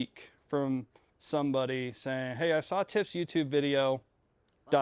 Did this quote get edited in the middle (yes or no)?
no